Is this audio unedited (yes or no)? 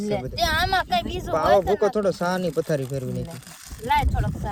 yes